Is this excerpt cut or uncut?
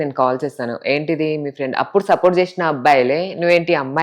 uncut